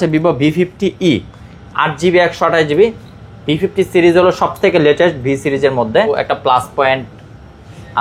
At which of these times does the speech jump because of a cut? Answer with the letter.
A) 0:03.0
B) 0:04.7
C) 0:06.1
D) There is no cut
C